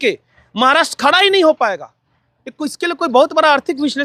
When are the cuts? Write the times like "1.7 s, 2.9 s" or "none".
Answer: none

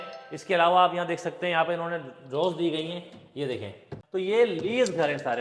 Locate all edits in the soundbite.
3.9 s

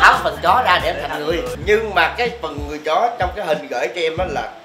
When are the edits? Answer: 1.6 s

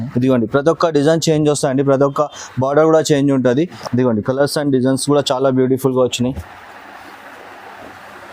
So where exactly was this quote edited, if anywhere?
3.8 s

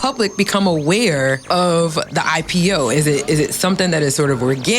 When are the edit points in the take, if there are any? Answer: 1.4 s

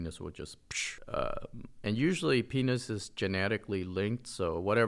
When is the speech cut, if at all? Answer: none

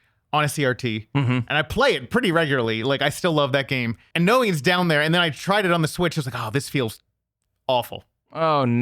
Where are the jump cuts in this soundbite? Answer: 4.0 s

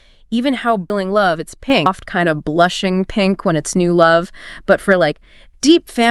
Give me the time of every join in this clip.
0.9 s, 1.9 s

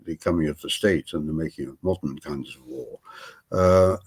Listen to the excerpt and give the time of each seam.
none

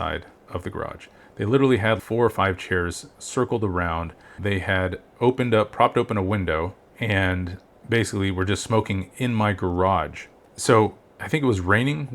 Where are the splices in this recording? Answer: 2.0 s

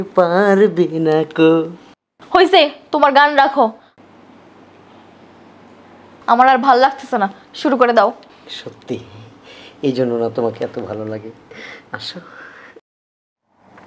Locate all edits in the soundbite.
12.9 s

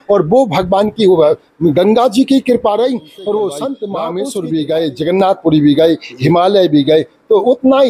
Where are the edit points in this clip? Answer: 3.9 s

